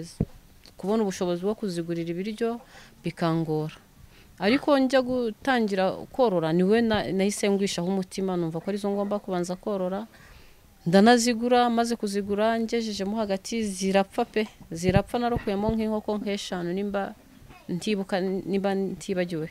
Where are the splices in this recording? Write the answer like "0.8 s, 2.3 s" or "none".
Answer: none